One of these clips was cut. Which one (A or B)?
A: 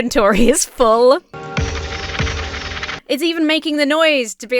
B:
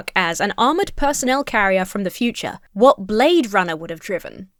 A